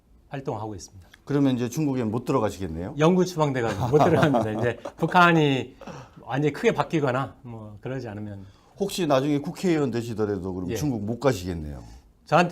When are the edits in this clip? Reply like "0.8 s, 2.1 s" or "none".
10.0 s